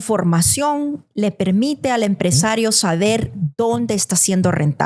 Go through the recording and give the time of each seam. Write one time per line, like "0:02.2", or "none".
none